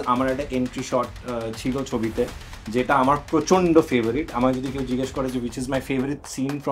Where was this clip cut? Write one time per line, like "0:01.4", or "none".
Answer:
none